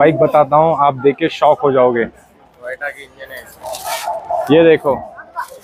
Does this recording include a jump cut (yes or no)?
no